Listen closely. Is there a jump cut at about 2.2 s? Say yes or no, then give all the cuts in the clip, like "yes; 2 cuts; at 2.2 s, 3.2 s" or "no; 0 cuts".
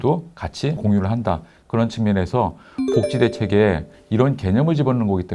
no; 2 cuts; at 0.8 s, 3.9 s